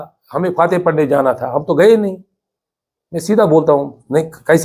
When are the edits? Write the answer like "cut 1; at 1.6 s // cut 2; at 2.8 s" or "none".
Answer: none